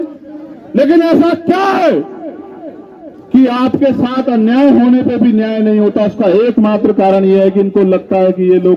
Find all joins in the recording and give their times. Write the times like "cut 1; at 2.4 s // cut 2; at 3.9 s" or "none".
none